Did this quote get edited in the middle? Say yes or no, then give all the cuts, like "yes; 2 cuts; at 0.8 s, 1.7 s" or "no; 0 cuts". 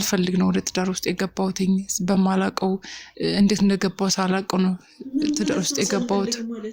no; 0 cuts